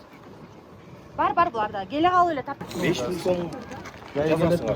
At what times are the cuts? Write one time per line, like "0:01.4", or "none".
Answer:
0:02.6